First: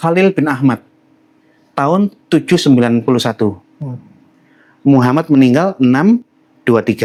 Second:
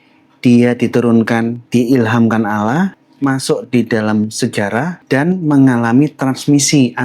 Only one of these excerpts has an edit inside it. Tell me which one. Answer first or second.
second